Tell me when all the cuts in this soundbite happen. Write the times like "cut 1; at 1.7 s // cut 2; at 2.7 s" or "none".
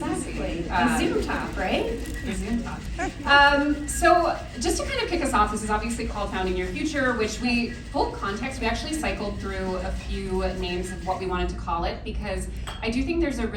none